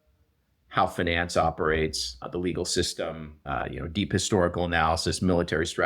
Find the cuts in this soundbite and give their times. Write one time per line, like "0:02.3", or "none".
0:03.3